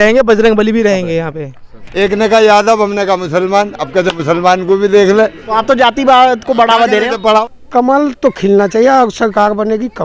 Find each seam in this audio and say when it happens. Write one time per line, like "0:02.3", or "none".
0:01.8
0:07.1